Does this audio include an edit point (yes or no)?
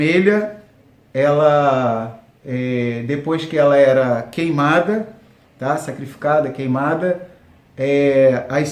no